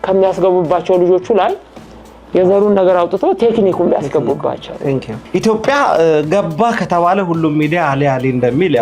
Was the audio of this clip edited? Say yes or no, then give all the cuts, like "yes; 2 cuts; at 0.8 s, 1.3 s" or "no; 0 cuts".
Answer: yes; 1 cut; at 5.2 s